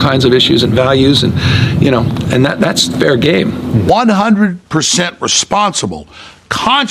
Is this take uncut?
no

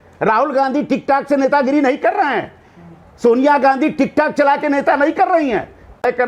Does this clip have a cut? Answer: no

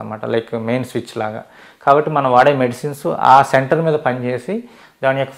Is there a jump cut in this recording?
no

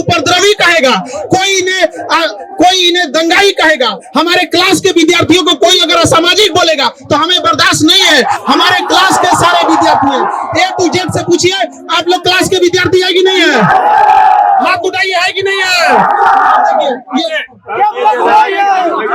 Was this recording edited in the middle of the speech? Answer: no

